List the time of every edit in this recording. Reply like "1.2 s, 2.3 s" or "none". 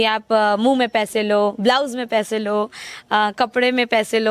none